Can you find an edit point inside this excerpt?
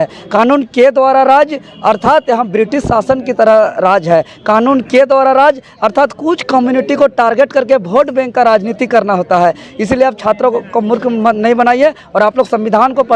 no; 0 cuts

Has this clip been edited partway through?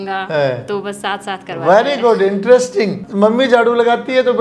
yes; 1 cut; at 3.0 s

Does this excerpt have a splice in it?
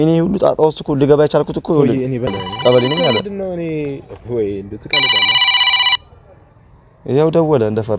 yes; 1 cut; at 2.3 s

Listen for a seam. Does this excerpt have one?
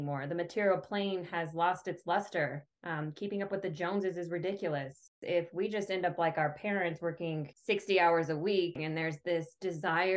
yes; 3 cuts; at 5.2 s, 7.5 s, 8.8 s

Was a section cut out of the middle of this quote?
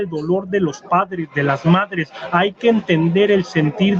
no; 0 cuts

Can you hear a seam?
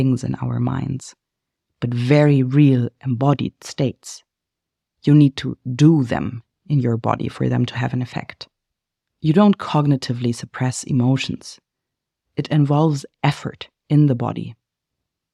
no; 0 cuts

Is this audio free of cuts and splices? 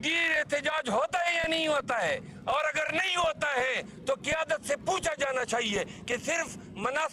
yes; 0 cuts

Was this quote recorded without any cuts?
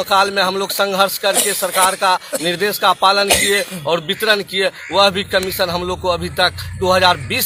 yes; 0 cuts

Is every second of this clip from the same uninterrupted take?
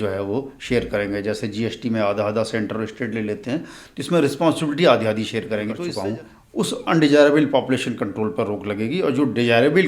no; 1 cut; at 5.9 s

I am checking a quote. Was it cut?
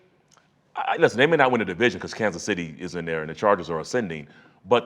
no; 0 cuts

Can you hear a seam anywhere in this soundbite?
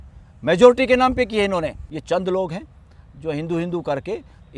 yes; 1 cut; at 1.8 s

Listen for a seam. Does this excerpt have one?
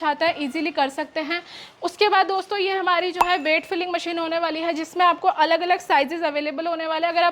no; 0 cuts

